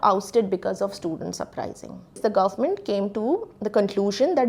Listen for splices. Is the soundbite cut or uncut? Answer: cut